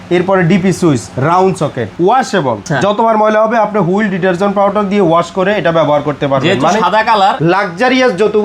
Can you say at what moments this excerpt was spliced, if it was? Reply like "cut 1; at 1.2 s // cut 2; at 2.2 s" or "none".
cut 1; at 1.9 s // cut 2; at 2.7 s // cut 3; at 7.4 s

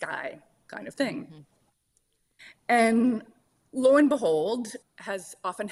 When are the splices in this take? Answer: none

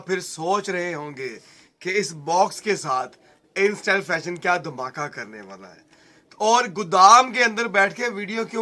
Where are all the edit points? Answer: none

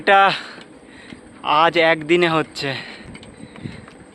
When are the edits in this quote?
none

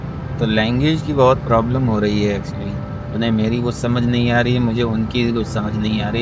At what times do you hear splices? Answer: none

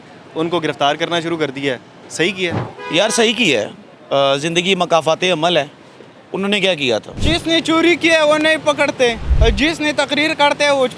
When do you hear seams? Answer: cut 1; at 2.7 s // cut 2; at 7.1 s // cut 3; at 9.3 s

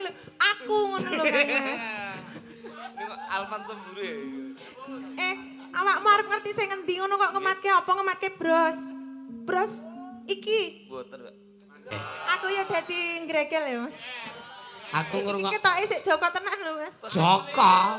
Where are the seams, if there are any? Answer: cut 1; at 11.9 s

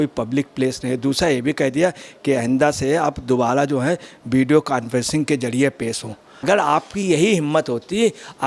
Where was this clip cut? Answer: cut 1; at 6.4 s

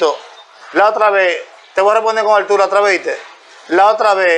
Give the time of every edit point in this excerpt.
none

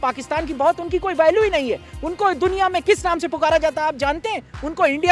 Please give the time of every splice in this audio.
none

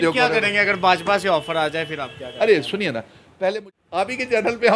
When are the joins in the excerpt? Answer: cut 1; at 3.6 s

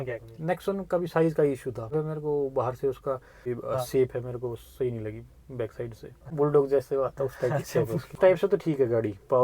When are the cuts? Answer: cut 1; at 1.9 s // cut 2; at 3.4 s // cut 3; at 6.3 s // cut 4; at 8.2 s

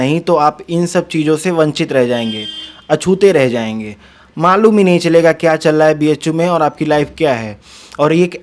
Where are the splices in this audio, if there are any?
none

